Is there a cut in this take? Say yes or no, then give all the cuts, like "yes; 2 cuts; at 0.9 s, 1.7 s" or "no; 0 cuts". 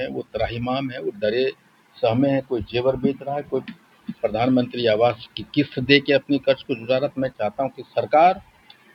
no; 0 cuts